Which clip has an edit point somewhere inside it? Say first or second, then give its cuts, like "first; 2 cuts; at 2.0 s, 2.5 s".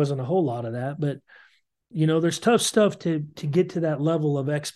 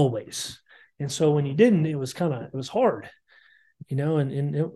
first; 1 cut; at 1.9 s